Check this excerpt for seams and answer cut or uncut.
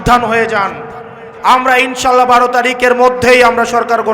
cut